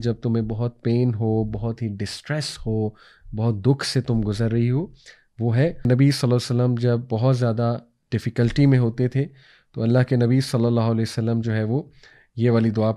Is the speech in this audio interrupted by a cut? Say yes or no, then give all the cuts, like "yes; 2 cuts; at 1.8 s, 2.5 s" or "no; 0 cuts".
yes; 1 cut; at 5.9 s